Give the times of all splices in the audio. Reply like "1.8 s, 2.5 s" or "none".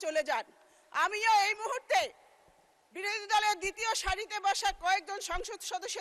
none